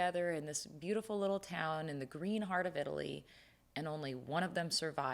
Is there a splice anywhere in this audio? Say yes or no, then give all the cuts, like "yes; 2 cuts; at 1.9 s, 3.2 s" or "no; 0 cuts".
no; 0 cuts